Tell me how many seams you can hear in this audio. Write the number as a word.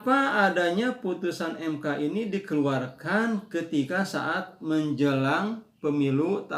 zero